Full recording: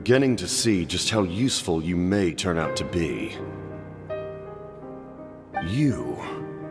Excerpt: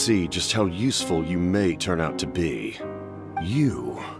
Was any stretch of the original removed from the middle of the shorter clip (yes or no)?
yes